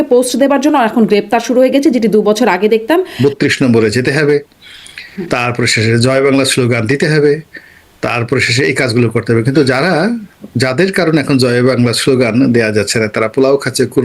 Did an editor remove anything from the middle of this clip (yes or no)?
yes